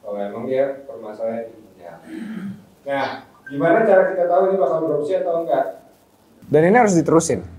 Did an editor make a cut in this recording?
yes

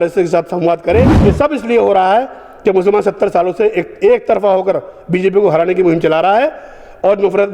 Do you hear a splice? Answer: yes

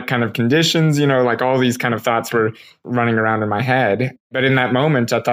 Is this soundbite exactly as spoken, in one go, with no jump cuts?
no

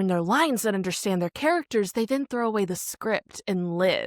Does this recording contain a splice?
no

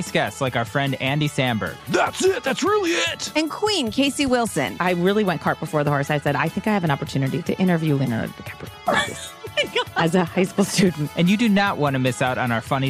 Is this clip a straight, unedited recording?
no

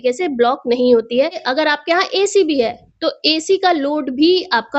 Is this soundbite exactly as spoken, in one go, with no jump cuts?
no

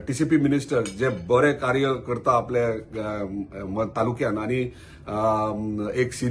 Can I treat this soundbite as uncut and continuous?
yes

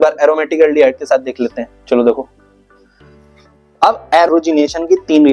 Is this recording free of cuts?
no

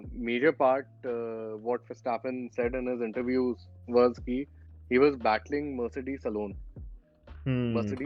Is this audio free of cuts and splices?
yes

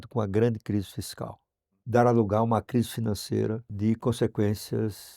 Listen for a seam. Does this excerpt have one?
yes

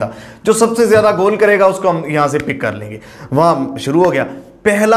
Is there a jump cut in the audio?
no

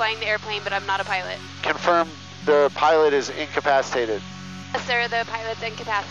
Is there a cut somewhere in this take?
yes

